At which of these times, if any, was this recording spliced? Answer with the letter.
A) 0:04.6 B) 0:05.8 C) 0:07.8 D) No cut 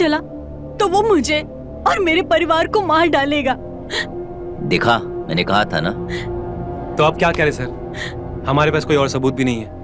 D